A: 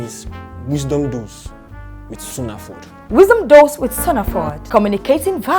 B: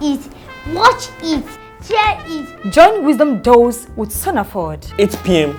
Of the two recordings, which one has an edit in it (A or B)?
A